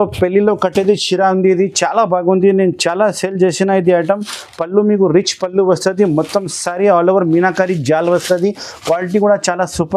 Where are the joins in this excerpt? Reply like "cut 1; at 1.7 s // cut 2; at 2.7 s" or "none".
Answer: none